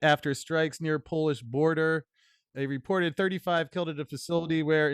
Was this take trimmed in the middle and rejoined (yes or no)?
yes